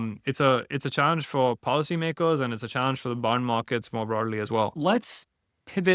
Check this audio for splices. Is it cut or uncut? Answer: uncut